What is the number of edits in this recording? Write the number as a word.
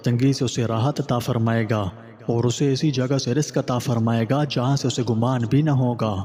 zero